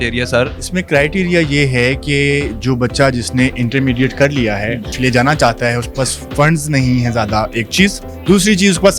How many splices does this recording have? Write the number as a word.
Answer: two